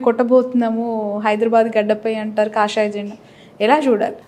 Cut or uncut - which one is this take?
uncut